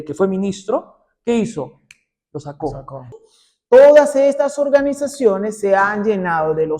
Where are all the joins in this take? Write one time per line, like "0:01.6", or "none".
0:03.1